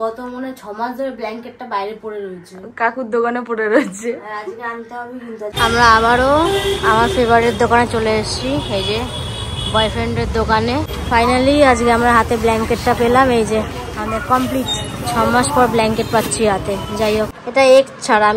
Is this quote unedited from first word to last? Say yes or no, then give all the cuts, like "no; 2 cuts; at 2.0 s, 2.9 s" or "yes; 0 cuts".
no; 3 cuts; at 5.6 s, 10.9 s, 17.4 s